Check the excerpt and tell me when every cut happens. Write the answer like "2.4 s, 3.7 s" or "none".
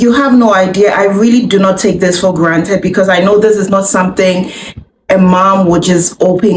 none